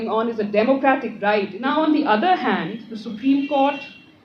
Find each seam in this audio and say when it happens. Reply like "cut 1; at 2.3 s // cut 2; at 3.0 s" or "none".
cut 1; at 1.5 s